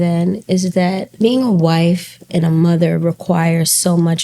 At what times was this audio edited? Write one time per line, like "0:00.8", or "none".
0:01.1